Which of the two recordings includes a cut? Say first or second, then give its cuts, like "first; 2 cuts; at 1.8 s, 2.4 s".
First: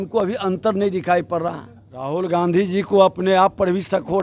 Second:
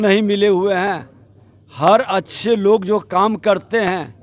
first; 1 cut; at 2.1 s